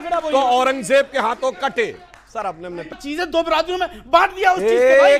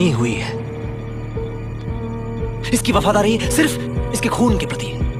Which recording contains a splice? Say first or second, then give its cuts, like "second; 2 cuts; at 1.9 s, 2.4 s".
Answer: first; 1 cut; at 3.0 s